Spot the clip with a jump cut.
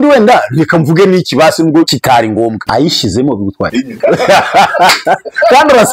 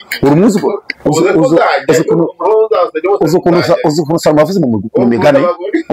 first; 2 cuts; at 2.1 s, 3.9 s

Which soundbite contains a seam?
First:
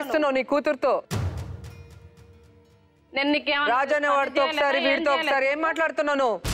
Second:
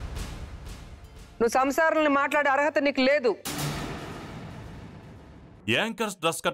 second; 2 cuts; at 1.2 s, 5.5 s

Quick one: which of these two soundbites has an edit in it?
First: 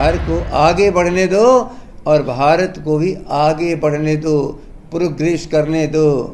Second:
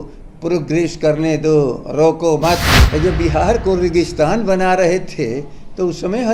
second; 1 cut; at 2.8 s

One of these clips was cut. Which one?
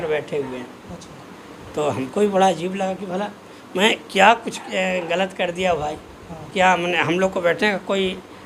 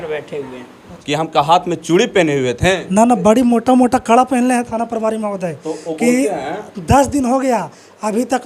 second; 1 cut; at 1.0 s

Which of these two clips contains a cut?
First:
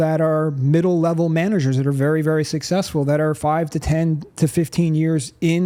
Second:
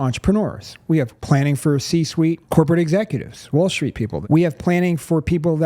second; 3 cuts; at 1.2 s, 2.4 s, 4.2 s

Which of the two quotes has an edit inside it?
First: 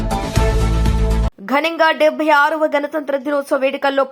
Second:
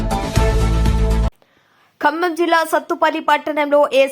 second; 1 cut; at 1.3 s

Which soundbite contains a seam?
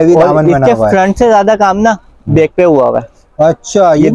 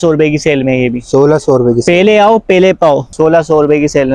second; 1 cut; at 3.1 s

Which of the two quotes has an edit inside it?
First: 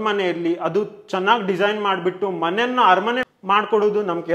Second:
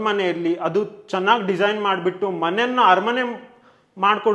first; 1 cut; at 3.3 s

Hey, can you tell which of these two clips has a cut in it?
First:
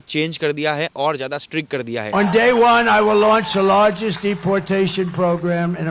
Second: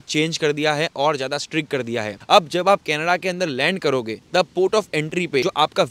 first; 1 cut; at 2.1 s

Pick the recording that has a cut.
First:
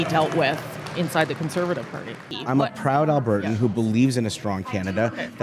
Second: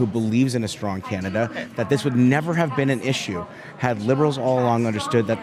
first; 1 cut; at 2.3 s

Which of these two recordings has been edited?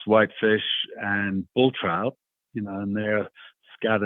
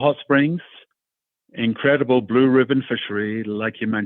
first; 1 cut; at 2.3 s

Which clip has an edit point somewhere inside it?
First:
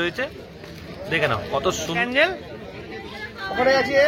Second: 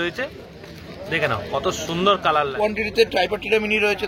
second; 1 cut; at 2.2 s

